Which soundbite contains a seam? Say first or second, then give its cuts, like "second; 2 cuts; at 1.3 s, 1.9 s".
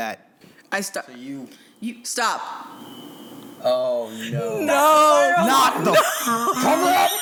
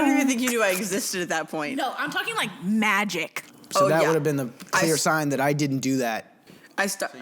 second; 1 cut; at 3.4 s